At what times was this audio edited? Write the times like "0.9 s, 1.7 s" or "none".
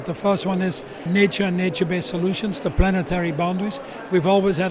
1.1 s